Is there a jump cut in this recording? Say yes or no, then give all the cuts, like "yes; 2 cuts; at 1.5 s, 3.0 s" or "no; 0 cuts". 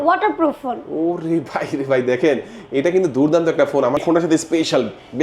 yes; 1 cut; at 4.0 s